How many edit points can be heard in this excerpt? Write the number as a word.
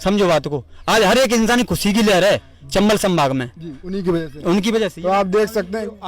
zero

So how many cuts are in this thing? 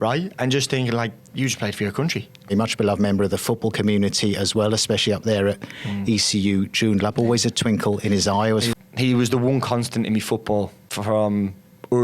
three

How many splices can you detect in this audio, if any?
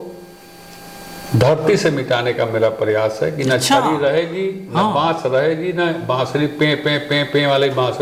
zero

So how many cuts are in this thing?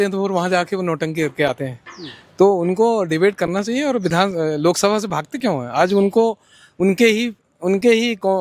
zero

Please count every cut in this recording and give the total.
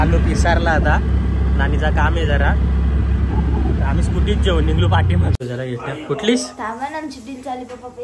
one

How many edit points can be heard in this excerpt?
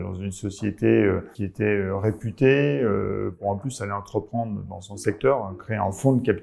two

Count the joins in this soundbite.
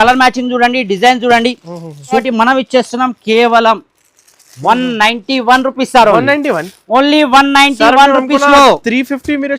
one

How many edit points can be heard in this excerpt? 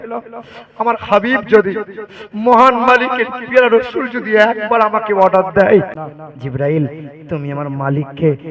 one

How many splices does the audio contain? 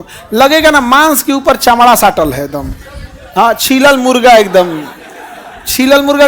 zero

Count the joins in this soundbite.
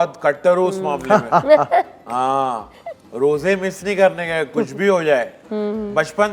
zero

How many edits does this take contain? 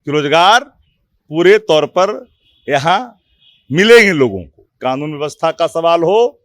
one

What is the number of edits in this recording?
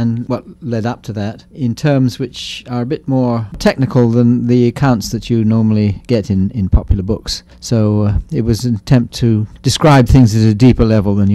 one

